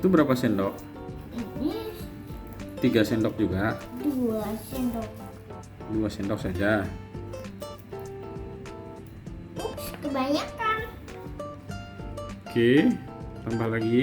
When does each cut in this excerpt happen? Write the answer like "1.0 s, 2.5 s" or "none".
6.9 s, 9.6 s, 11.1 s, 12.5 s